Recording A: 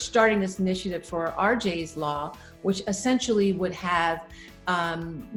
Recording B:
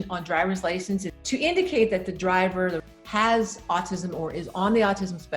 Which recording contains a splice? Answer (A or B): B